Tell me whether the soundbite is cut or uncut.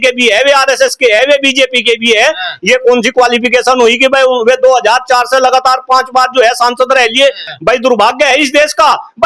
cut